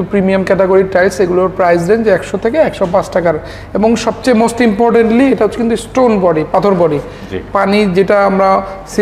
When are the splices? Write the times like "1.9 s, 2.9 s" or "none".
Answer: none